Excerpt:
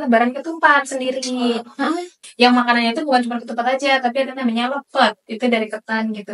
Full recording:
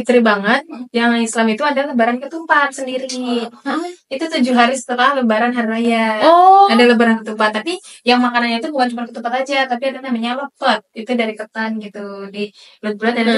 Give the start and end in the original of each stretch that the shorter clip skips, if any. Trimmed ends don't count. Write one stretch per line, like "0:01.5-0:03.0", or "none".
0:04.0-0:07.8